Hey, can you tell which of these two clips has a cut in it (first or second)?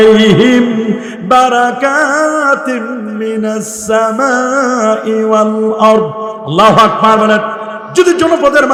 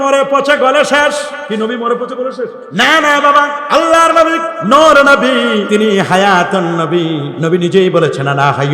second